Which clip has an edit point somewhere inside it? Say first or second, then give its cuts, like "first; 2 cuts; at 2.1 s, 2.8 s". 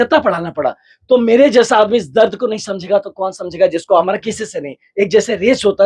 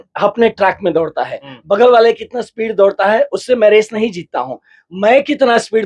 first; 1 cut; at 4.1 s